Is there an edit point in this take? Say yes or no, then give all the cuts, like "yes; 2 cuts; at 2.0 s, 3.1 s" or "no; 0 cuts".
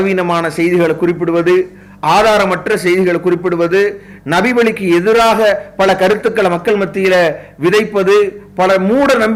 no; 0 cuts